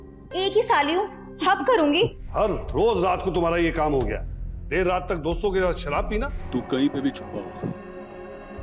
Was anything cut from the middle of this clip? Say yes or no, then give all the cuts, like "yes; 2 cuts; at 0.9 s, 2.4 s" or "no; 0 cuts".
yes; 2 cuts; at 2.2 s, 6.4 s